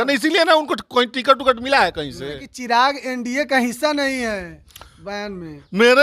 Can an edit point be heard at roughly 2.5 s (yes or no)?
yes